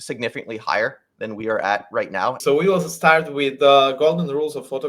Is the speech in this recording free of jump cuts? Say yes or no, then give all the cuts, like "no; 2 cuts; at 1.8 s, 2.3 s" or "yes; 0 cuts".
no; 1 cut; at 2.4 s